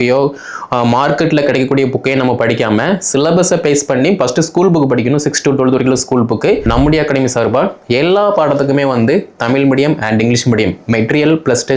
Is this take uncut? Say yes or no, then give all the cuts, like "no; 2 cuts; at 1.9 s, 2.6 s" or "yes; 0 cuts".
no; 1 cut; at 6.6 s